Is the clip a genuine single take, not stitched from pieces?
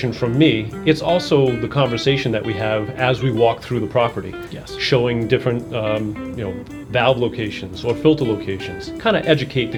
yes; 0 cuts

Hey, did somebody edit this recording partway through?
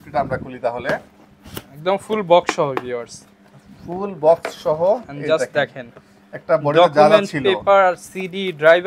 no; 0 cuts

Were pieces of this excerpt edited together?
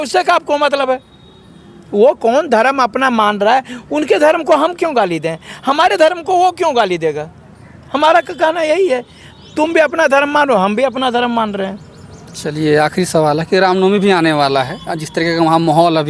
no; 0 cuts

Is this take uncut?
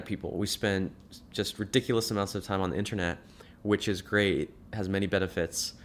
yes; 0 cuts

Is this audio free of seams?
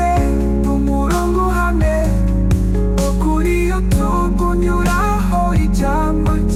yes; 0 cuts

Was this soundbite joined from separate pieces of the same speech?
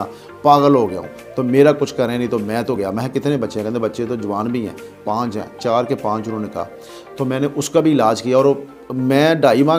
no; 0 cuts

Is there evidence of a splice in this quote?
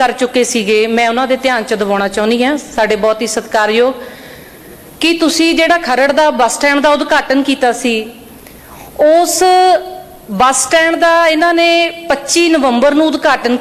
no; 0 cuts

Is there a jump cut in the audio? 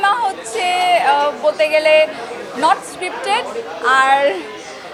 no; 0 cuts

